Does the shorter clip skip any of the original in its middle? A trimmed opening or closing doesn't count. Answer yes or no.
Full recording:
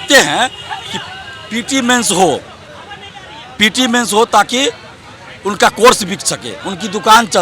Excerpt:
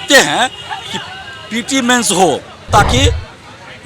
yes